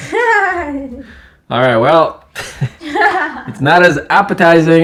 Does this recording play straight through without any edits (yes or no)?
yes